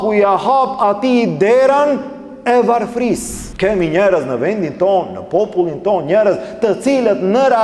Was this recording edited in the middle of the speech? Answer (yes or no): yes